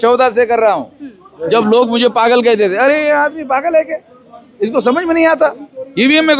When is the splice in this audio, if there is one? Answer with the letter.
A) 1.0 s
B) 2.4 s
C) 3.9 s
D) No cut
D